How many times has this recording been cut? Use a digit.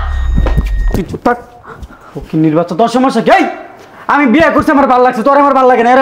0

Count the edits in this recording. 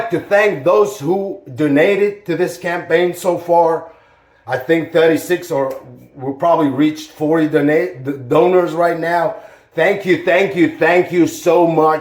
0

